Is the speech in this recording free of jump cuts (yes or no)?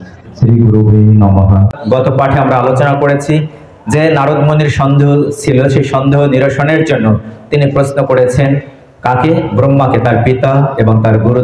no